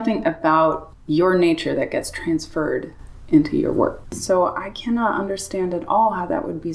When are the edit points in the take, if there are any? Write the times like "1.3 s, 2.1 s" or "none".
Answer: 4.1 s